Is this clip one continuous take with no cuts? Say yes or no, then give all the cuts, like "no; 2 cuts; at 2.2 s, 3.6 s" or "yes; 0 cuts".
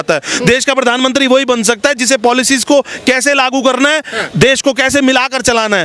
yes; 0 cuts